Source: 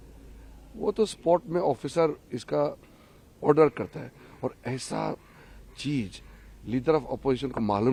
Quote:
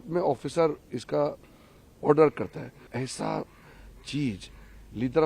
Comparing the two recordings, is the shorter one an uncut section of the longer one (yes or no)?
no